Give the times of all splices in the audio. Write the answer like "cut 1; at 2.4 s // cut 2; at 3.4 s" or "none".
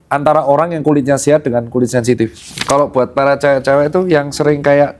cut 1; at 2.5 s

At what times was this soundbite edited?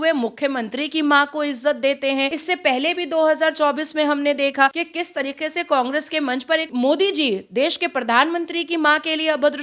cut 1; at 2.4 s // cut 2; at 4.7 s // cut 3; at 6.7 s

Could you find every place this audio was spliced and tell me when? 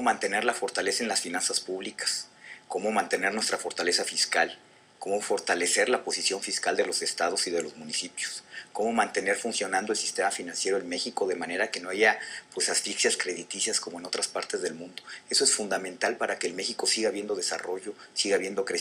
none

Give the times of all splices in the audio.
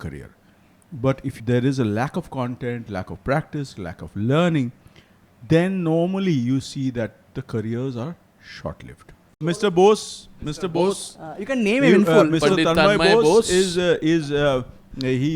cut 1; at 1.3 s // cut 2; at 9.6 s

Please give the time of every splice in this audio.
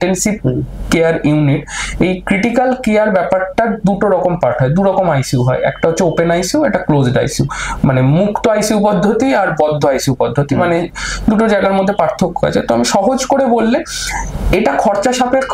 none

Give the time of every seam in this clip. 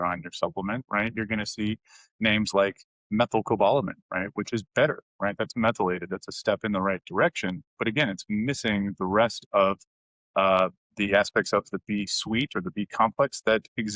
none

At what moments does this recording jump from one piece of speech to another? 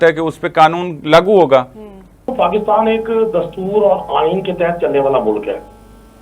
cut 1; at 2.3 s

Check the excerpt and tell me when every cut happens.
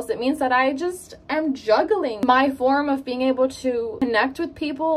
cut 1; at 2.2 s // cut 2; at 3.9 s

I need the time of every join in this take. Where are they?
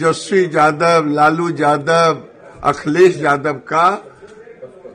none

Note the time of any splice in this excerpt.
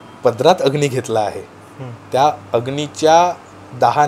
none

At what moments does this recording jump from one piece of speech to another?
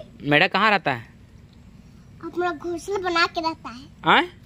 none

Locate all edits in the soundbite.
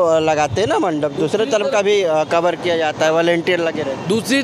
none

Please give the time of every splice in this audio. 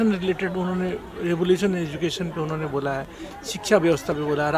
none

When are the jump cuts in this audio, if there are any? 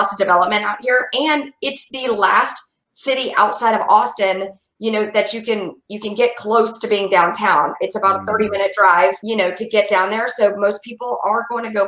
cut 1; at 9.2 s

